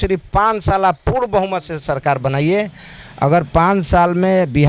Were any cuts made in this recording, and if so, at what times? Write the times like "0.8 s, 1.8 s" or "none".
none